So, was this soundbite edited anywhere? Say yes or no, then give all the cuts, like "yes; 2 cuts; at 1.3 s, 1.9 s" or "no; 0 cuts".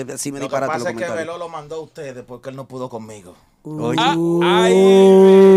no; 0 cuts